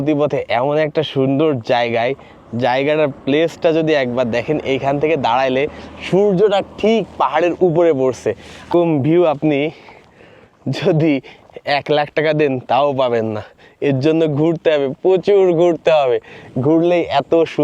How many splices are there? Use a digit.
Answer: 1